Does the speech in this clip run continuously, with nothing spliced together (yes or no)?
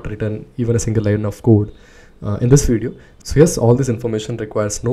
yes